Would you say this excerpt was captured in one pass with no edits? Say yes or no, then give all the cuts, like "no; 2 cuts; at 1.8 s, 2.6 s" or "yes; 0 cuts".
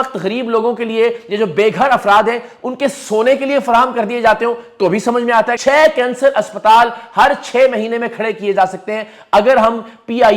no; 1 cut; at 5.6 s